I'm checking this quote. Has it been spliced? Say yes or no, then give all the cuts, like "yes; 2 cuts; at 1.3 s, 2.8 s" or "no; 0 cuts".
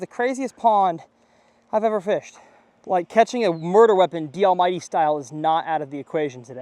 no; 0 cuts